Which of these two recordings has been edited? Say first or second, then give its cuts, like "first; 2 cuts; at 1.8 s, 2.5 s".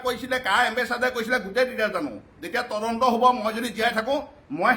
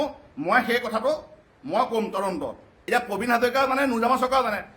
second; 1 cut; at 2.7 s